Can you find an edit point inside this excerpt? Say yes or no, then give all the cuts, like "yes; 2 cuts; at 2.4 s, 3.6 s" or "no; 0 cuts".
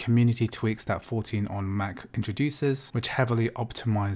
yes; 1 cut; at 2.9 s